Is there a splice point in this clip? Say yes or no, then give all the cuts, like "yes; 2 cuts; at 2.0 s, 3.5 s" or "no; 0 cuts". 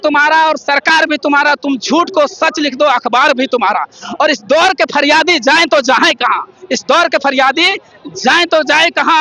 no; 0 cuts